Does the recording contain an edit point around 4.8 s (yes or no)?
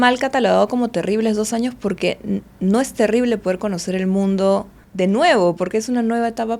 yes